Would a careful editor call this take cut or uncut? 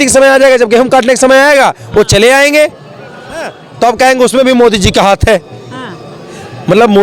cut